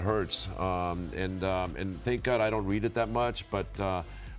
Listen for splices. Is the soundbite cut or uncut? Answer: uncut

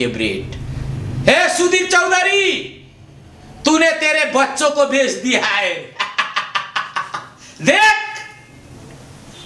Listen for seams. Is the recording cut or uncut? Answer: uncut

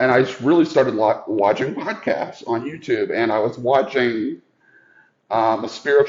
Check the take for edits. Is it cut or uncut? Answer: uncut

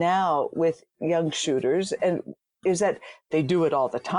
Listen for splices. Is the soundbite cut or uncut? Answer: cut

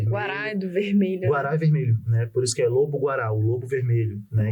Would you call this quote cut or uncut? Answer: uncut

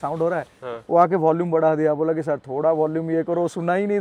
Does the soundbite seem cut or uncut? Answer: uncut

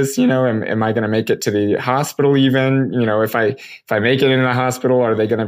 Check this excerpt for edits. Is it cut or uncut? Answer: uncut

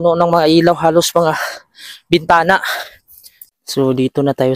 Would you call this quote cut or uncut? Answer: cut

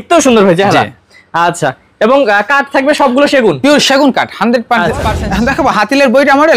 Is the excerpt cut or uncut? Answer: cut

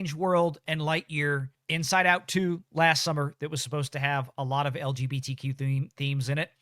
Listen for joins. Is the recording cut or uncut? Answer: cut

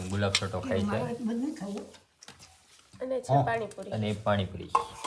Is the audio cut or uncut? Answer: uncut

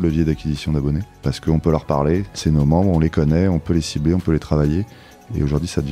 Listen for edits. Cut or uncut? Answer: cut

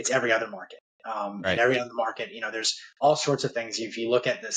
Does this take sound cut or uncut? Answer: uncut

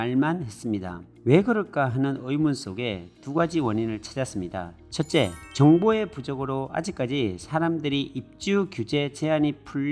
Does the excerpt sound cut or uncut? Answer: cut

